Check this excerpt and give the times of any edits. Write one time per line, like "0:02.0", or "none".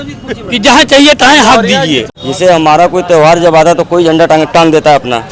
0:02.1

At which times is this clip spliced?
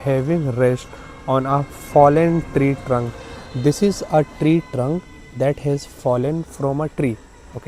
none

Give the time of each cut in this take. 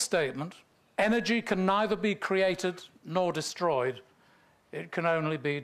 none

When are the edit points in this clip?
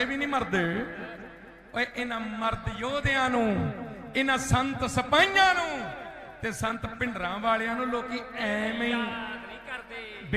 none

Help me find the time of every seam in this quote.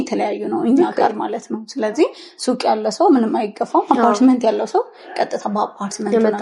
none

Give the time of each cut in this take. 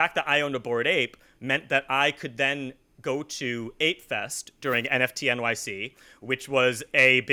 none

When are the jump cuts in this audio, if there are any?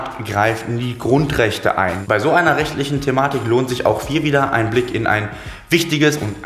0:02.0

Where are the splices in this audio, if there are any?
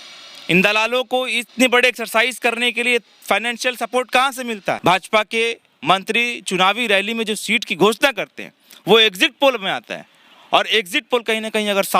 0:04.8

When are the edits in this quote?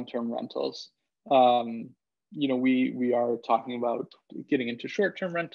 none

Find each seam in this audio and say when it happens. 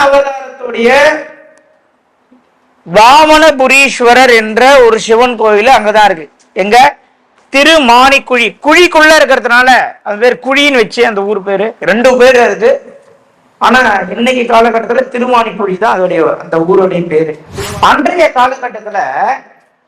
0:17.4

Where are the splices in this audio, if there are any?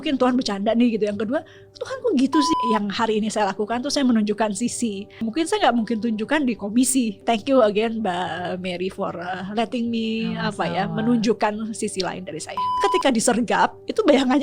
0:02.5
0:05.3
0:07.2
0:12.8

